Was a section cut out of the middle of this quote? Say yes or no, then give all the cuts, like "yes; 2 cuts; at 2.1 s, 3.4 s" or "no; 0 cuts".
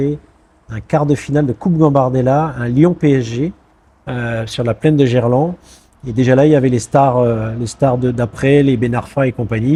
no; 0 cuts